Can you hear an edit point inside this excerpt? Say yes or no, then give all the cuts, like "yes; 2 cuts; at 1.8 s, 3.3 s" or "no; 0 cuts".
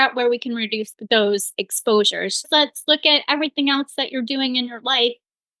yes; 2 cuts; at 0.9 s, 2.5 s